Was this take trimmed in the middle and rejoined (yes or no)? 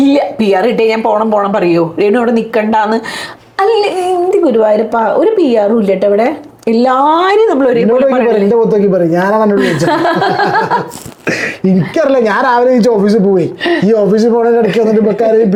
no